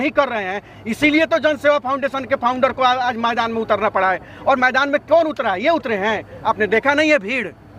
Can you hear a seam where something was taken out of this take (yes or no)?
no